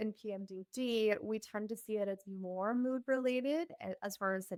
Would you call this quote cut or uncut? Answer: uncut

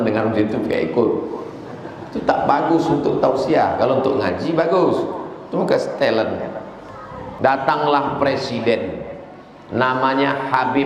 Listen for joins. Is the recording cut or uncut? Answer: cut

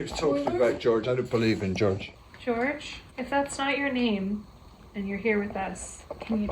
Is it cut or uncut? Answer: cut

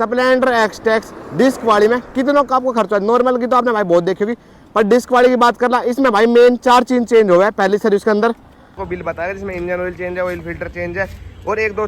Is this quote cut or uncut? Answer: cut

